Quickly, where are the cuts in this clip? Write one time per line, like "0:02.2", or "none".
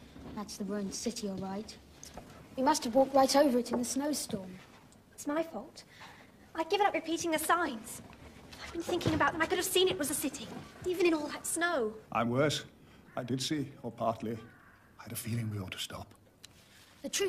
0:01.4